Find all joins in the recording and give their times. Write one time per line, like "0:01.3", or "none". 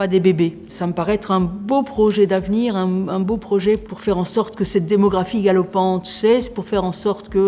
none